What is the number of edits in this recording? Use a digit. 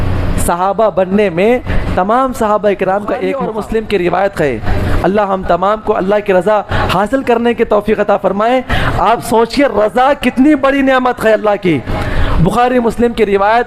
1